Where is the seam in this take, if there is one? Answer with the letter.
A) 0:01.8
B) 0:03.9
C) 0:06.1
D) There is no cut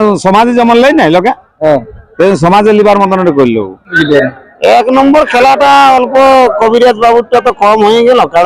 B